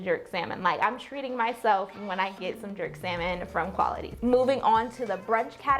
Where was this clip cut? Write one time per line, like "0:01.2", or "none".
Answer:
none